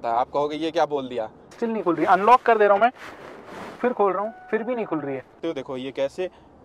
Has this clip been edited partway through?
yes; 2 cuts; at 1.5 s, 5.3 s

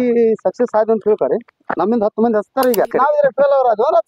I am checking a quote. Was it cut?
yes; 1 cut; at 2.9 s

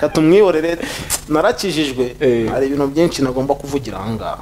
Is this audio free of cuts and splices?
yes; 0 cuts

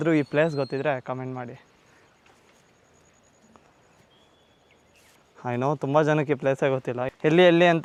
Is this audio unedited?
yes; 0 cuts

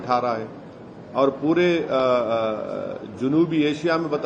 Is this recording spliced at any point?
no; 0 cuts

